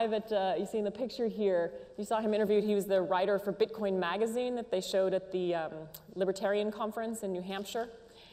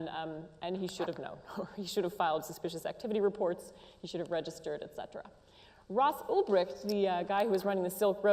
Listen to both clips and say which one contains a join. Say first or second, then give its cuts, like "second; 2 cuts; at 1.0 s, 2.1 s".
second; 1 cut; at 3.7 s